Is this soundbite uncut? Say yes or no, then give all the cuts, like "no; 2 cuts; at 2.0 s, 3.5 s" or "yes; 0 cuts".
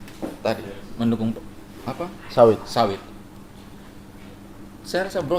yes; 0 cuts